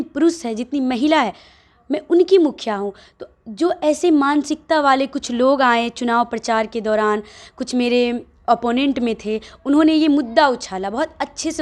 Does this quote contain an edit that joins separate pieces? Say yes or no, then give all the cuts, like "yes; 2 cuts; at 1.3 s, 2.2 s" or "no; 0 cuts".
no; 0 cuts